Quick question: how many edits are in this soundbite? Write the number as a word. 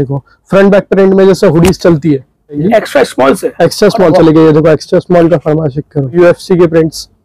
two